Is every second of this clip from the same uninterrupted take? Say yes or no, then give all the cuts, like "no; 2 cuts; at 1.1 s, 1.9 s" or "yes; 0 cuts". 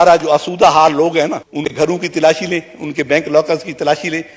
no; 1 cut; at 1.7 s